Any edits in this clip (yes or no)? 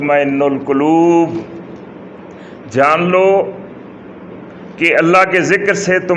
no